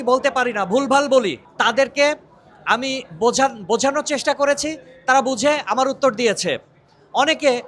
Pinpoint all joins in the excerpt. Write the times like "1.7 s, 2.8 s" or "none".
1.5 s